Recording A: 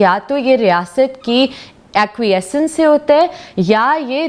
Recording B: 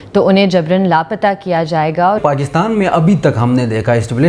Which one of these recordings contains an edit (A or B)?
B